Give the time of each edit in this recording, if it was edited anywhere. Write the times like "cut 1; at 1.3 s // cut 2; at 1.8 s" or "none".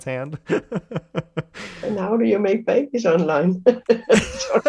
cut 1; at 1.6 s